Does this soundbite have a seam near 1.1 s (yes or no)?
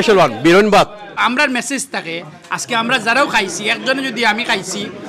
yes